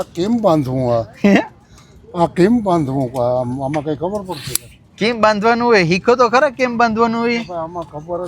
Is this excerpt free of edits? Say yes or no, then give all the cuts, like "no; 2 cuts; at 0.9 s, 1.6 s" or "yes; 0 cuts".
yes; 0 cuts